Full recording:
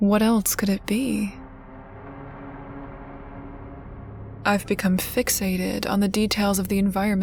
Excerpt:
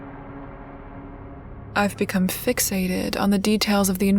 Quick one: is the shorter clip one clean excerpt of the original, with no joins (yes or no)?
no